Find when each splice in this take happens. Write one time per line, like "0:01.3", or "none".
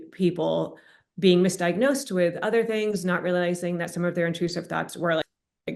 none